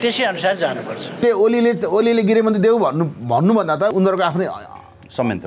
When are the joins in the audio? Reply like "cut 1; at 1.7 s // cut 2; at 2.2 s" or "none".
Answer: cut 1; at 1.2 s // cut 2; at 3.9 s